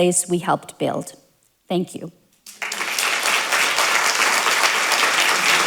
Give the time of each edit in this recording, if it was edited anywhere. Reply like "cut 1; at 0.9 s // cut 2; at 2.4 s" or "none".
none